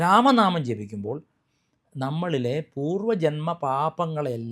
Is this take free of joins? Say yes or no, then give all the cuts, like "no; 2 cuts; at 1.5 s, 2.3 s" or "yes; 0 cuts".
yes; 0 cuts